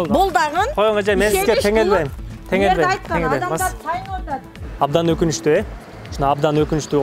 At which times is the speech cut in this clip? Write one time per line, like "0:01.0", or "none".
none